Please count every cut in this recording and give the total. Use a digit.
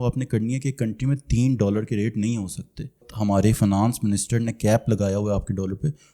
1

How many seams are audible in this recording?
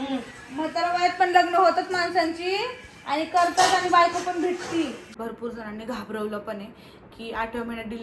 1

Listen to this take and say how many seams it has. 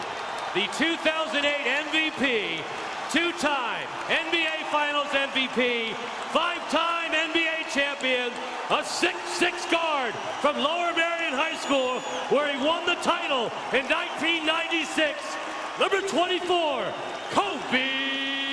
1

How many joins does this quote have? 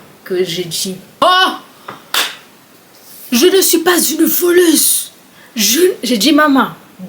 1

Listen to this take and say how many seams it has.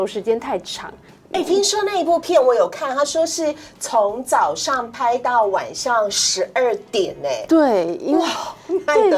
0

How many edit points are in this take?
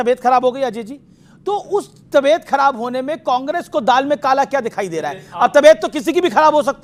0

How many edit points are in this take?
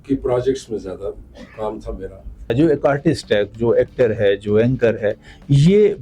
1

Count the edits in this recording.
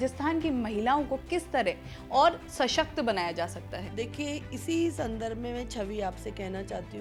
0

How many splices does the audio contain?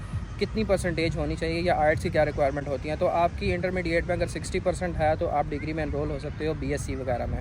0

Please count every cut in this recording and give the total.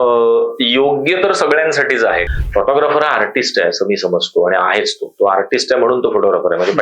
1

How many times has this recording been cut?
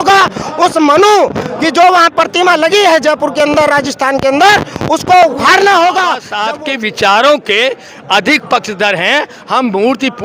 1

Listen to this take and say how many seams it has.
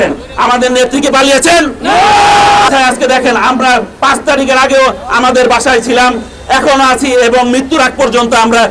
1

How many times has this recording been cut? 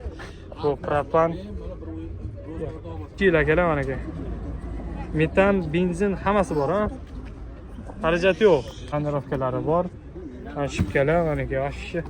2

